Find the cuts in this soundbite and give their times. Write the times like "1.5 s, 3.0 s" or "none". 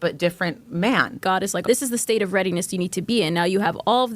1.4 s